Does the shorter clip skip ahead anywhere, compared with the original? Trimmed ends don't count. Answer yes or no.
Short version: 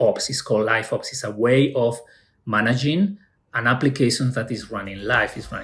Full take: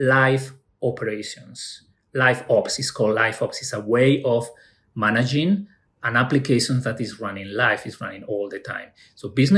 no